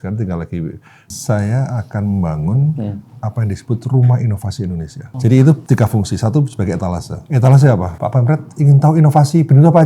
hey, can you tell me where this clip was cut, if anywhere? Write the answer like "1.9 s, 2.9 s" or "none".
1.1 s, 5.0 s, 5.6 s, 7.2 s, 7.9 s